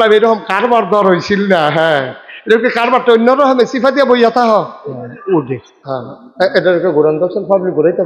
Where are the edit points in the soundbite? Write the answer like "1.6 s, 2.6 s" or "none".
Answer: 5.9 s